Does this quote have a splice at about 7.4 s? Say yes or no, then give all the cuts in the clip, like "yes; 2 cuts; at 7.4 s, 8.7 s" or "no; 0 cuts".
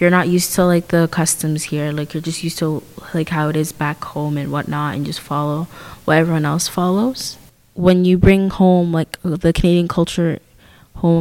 no; 0 cuts